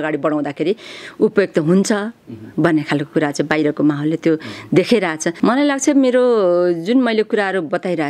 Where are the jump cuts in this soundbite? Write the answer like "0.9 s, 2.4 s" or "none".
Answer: 5.4 s